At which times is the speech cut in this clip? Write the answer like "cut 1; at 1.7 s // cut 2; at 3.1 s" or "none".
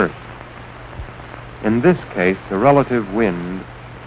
cut 1; at 1.7 s